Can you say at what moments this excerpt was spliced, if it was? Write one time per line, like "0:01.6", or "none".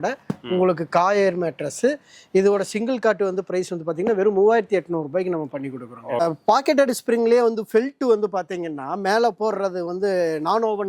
0:06.2